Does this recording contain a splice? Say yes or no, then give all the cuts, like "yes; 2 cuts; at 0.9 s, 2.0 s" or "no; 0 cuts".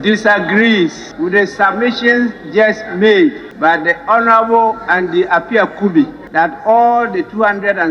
yes; 3 cuts; at 1.0 s, 3.5 s, 6.2 s